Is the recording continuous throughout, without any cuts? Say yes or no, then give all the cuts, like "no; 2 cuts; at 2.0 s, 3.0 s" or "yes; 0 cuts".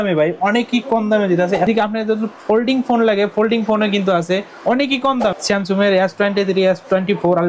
no; 2 cuts; at 1.7 s, 5.4 s